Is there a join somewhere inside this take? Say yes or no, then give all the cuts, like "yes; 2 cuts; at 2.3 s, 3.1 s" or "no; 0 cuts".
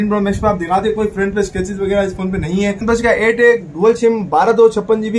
yes; 1 cut; at 2.8 s